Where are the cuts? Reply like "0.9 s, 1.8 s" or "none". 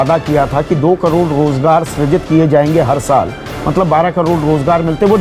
none